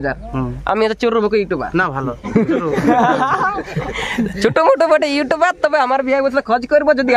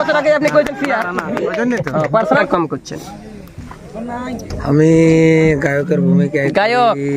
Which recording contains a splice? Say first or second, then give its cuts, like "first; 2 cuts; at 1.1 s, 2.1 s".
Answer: second; 1 cut; at 2.5 s